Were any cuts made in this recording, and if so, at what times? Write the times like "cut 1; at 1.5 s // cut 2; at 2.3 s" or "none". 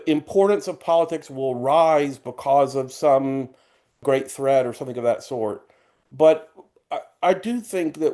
cut 1; at 4.0 s